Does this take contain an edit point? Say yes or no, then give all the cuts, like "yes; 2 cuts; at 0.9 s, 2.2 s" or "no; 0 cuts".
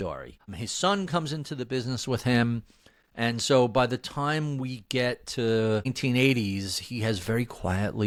no; 0 cuts